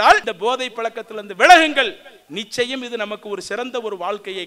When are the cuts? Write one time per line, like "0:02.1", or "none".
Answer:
none